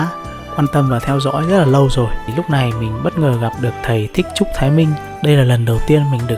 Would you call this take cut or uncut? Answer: cut